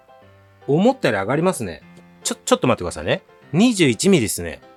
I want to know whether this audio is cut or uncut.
uncut